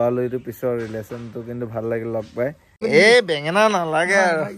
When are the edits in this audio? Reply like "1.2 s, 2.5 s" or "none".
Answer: 2.8 s

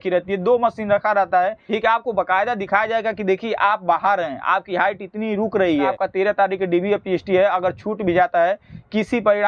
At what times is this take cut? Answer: 1.6 s, 5.9 s

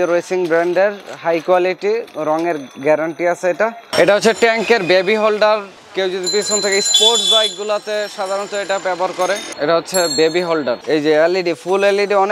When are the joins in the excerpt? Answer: 3.8 s, 5.8 s, 9.5 s, 10.8 s

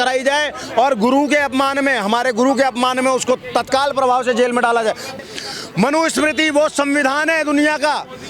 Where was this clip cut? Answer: 5.1 s

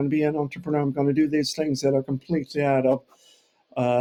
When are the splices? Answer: none

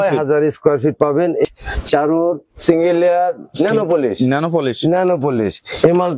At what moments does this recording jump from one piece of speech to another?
1.4 s

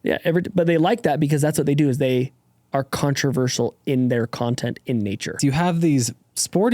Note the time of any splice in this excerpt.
5.4 s

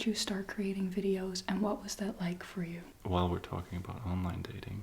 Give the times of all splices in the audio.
2.9 s

